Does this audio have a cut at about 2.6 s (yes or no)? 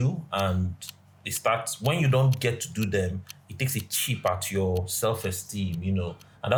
no